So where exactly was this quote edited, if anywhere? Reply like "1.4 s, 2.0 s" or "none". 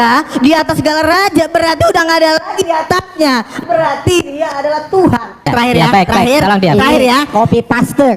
5.5 s